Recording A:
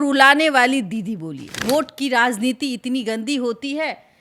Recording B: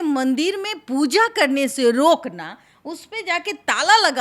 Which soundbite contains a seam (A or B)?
A